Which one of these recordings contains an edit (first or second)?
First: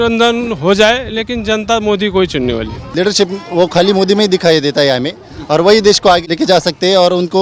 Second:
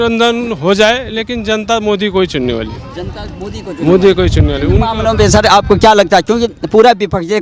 first